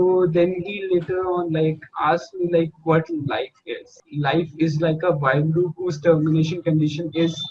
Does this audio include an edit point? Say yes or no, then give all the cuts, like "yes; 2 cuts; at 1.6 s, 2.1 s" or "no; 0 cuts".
yes; 1 cut; at 4.1 s